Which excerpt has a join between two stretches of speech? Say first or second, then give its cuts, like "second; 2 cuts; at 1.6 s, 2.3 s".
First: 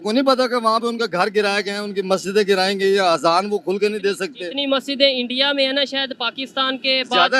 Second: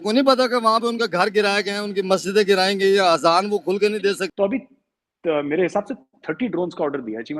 second; 1 cut; at 4.3 s